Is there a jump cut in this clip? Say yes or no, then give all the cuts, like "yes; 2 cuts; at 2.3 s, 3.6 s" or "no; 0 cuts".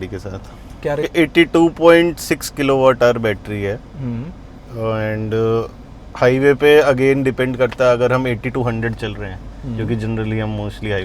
yes; 1 cut; at 1.1 s